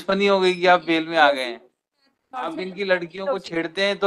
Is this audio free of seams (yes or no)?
no